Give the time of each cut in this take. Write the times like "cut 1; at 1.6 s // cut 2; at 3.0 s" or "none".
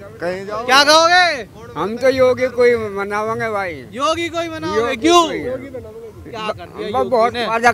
none